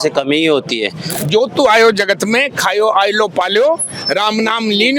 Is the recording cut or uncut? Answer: cut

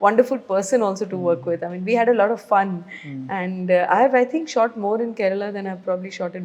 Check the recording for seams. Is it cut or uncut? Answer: uncut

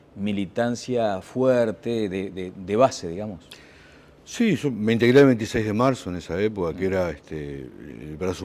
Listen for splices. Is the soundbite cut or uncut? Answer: uncut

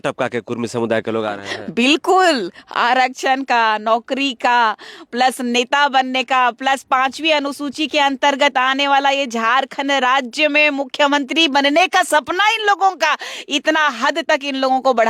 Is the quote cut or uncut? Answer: uncut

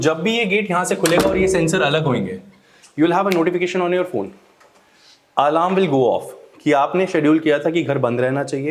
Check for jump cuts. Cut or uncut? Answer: uncut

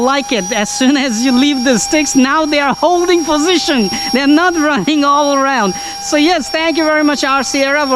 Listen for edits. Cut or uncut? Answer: uncut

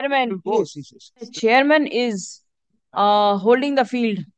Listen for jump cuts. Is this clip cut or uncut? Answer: cut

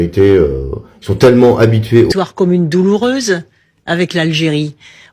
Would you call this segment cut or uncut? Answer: cut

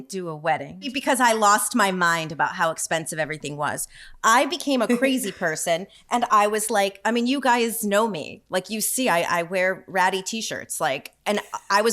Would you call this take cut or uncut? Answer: cut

